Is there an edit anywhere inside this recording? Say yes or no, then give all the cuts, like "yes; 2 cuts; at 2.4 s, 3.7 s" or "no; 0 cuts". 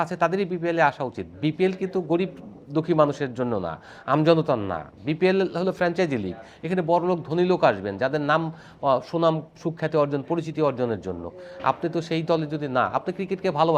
no; 0 cuts